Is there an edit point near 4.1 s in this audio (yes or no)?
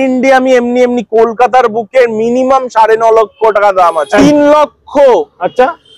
yes